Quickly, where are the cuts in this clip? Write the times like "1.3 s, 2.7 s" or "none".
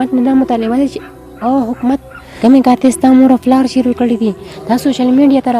2.3 s